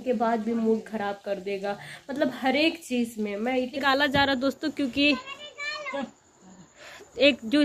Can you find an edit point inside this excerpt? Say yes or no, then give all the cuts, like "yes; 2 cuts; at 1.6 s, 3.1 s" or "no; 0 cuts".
yes; 1 cut; at 3.8 s